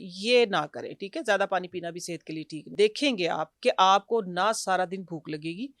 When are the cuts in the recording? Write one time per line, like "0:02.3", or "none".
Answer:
0:02.7